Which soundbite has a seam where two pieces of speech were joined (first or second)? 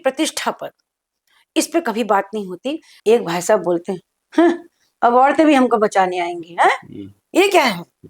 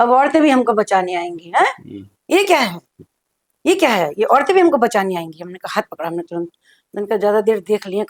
first